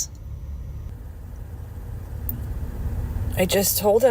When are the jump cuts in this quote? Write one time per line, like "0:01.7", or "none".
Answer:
0:00.9